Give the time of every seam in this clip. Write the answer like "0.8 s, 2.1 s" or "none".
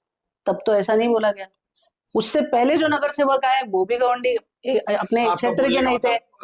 none